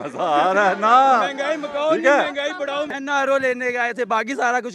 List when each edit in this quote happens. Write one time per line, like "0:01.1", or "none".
0:02.9